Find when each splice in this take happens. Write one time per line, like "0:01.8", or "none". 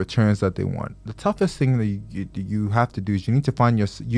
none